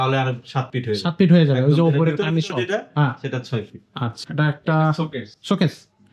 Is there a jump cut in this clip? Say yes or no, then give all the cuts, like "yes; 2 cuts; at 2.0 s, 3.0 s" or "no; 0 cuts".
yes; 1 cut; at 4.2 s